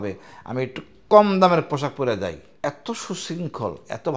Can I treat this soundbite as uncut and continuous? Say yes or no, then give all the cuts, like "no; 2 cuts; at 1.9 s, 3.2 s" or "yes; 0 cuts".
no; 1 cut; at 2.5 s